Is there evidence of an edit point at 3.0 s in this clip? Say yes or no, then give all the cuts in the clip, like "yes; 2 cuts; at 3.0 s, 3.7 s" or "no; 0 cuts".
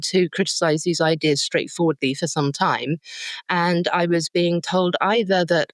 no; 0 cuts